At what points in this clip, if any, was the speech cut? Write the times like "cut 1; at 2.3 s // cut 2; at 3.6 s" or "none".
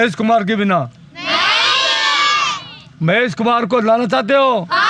none